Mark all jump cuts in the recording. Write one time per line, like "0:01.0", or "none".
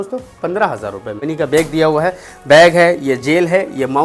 0:01.2